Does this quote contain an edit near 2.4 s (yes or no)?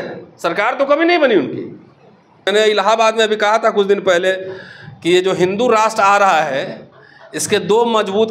yes